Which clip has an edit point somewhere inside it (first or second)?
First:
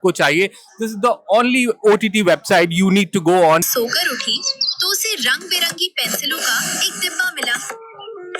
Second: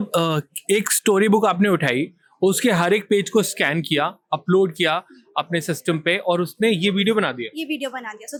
first